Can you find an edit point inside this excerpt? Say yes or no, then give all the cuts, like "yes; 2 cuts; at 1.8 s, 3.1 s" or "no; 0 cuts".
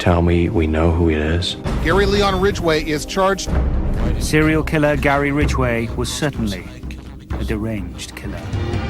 yes; 1 cut; at 1.2 s